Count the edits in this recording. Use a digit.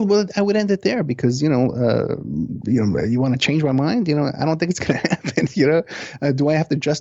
0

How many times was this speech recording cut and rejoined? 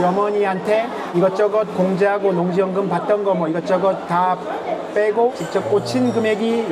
0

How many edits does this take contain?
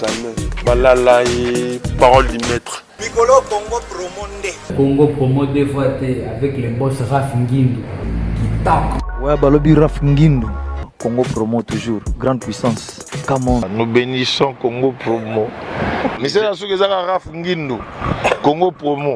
3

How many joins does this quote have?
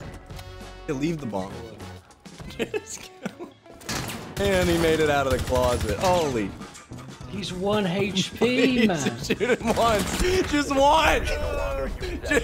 0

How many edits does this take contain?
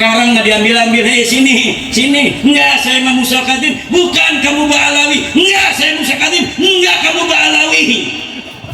0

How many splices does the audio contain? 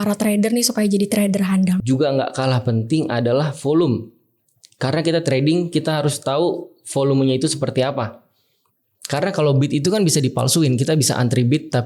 1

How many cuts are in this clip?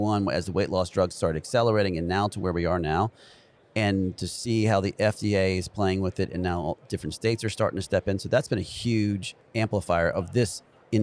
1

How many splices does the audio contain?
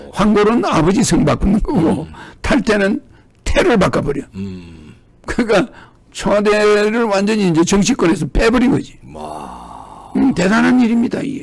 0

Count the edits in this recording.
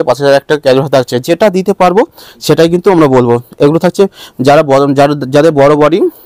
0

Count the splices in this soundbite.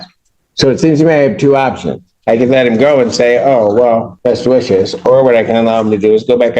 1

